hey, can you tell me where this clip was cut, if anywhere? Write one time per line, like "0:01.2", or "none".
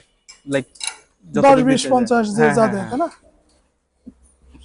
none